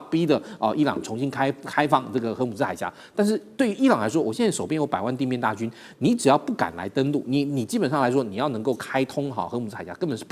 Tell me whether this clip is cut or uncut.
uncut